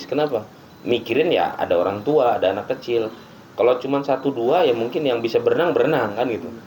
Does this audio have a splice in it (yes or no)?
no